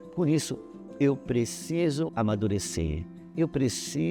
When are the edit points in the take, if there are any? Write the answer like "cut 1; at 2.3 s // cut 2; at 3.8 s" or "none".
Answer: cut 1; at 2.1 s

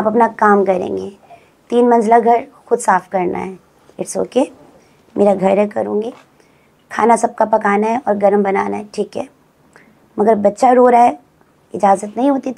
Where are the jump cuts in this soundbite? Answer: none

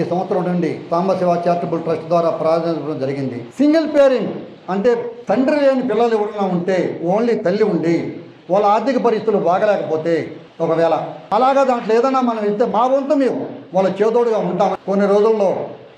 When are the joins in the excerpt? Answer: cut 1; at 3.4 s // cut 2; at 10.6 s // cut 3; at 14.8 s

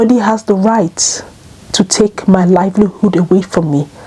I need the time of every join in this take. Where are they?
none

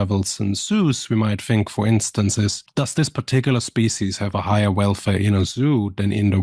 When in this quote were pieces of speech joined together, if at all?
cut 1; at 2.6 s

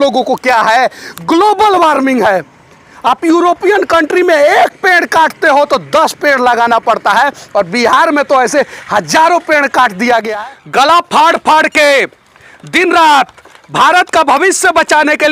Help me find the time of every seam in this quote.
cut 1; at 10.3 s

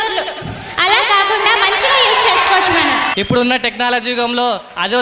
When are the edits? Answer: cut 1; at 3.1 s

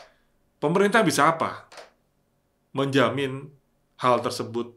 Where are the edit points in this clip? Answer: none

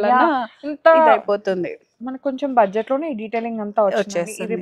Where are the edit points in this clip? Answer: none

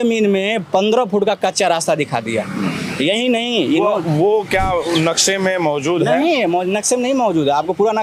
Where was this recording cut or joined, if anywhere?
none

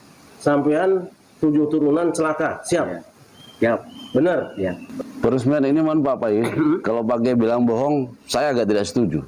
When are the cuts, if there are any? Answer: cut 1; at 4.8 s

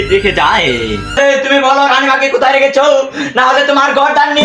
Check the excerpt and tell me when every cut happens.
cut 1; at 1.2 s

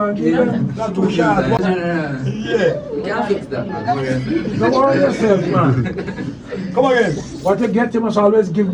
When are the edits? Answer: cut 1; at 1.6 s

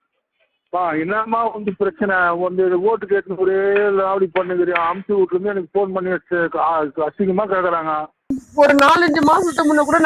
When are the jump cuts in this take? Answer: cut 1; at 8.4 s

